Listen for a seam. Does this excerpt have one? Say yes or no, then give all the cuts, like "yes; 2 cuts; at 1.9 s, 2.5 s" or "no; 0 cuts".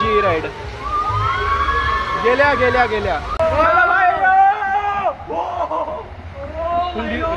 no; 0 cuts